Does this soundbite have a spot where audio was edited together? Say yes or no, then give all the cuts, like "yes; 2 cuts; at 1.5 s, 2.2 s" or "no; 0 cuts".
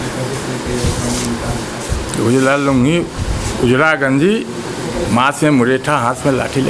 no; 0 cuts